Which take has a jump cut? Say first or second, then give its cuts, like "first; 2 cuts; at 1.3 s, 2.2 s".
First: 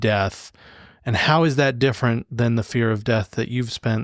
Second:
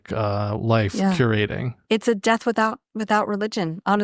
second; 1 cut; at 1.7 s